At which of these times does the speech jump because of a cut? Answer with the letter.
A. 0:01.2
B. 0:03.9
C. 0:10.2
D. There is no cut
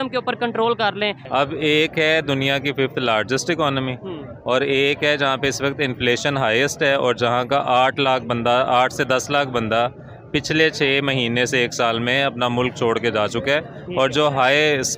A